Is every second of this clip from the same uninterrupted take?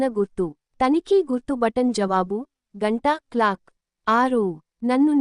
no; 2 cuts; at 0.9 s, 2.3 s

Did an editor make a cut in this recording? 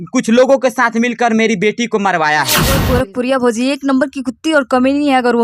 yes; 1 cut; at 2.8 s

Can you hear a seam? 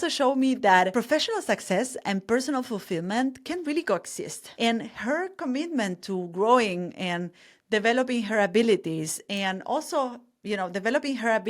yes; 2 cuts; at 0.9 s, 4.5 s

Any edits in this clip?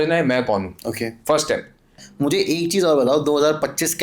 yes; 1 cut; at 2.0 s

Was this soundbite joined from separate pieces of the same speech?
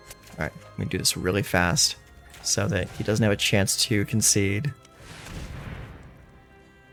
no; 0 cuts

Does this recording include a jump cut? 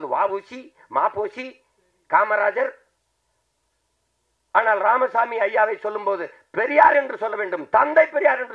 no; 0 cuts

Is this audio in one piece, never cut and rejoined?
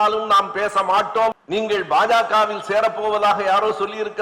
no; 1 cut; at 1.3 s

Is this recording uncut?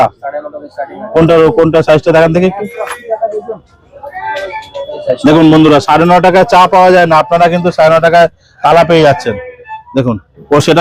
yes; 0 cuts

